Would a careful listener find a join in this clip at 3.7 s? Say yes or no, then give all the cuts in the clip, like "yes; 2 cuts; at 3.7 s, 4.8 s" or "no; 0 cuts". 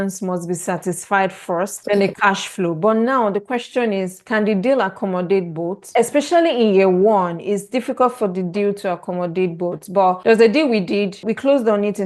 no; 2 cuts; at 1.8 s, 5.8 s